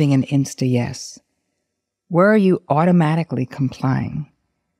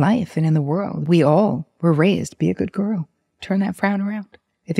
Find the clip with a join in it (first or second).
second